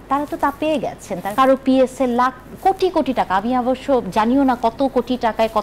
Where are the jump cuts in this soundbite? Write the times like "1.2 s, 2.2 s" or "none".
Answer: 1.2 s

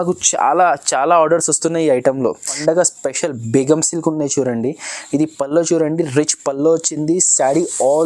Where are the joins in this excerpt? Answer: 2.5 s

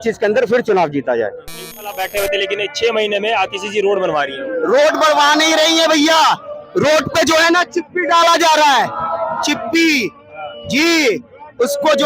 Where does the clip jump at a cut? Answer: 2.0 s

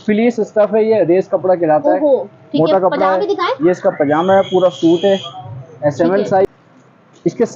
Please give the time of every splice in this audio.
6.5 s

